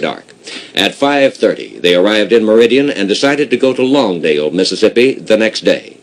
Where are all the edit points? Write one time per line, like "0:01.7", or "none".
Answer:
0:01.3